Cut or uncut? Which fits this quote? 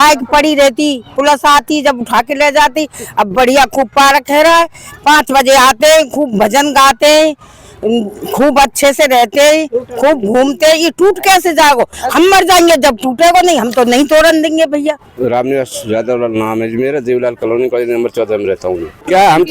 uncut